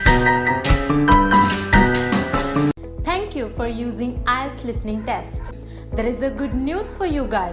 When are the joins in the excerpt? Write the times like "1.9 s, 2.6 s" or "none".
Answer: 2.7 s